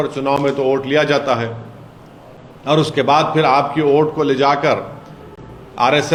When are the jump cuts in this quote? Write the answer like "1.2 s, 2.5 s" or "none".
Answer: none